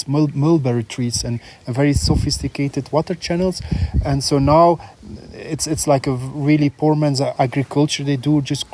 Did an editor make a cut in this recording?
yes; 1 cut; at 7.3 s

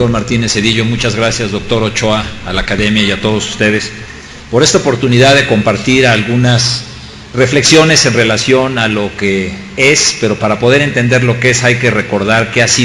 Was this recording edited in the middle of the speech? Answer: no; 0 cuts

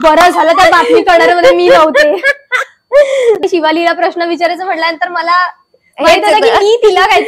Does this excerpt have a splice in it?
yes; 1 cut; at 3.4 s

